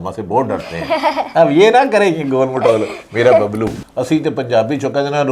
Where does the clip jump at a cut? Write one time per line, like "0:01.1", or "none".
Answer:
0:03.9